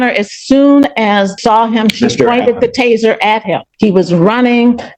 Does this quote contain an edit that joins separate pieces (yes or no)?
yes